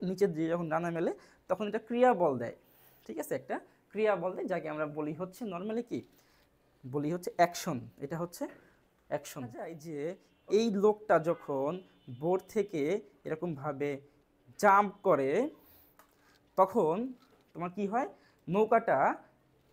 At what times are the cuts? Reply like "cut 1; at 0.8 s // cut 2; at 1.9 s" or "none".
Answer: cut 1; at 9.8 s